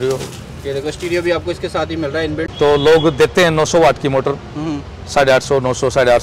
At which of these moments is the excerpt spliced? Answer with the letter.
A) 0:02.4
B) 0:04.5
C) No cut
A